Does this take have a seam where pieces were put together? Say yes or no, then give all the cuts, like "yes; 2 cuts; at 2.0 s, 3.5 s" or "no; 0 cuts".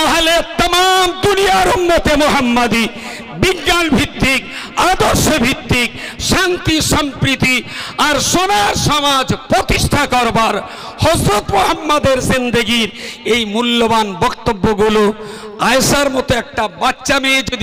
no; 0 cuts